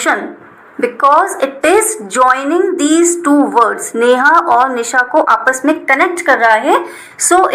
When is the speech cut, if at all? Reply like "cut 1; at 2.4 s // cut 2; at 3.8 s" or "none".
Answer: none